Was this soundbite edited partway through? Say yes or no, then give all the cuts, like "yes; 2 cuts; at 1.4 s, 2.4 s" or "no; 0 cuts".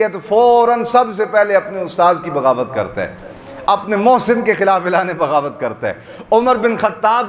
no; 0 cuts